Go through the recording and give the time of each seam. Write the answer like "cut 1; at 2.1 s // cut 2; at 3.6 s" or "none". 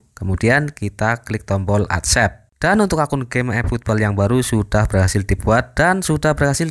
cut 1; at 2.5 s